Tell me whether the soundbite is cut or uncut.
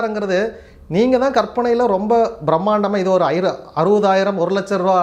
uncut